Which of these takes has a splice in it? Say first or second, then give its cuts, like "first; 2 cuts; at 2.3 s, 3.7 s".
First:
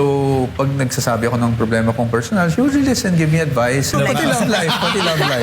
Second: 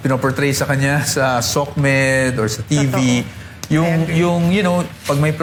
first; 1 cut; at 3.9 s